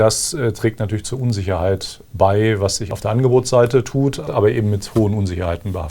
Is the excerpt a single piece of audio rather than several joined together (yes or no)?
no